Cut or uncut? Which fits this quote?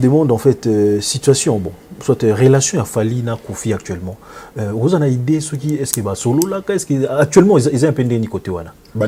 uncut